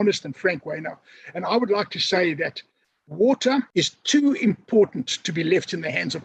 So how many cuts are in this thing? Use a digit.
1